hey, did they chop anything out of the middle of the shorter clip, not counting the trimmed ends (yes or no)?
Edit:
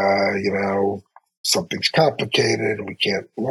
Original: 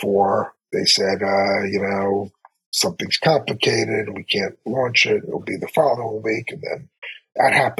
no